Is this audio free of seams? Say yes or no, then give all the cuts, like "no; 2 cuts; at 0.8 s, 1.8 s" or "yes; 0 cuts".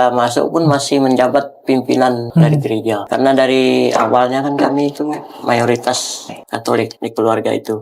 no; 1 cut; at 3.0 s